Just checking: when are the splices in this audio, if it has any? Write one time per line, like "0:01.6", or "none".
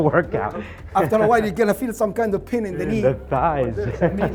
none